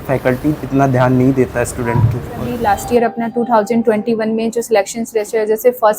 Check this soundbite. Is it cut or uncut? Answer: cut